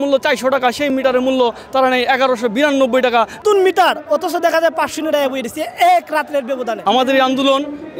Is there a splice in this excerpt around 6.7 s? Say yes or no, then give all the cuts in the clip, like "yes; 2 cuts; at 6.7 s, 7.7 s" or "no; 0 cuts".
yes; 2 cuts; at 3.4 s, 6.7 s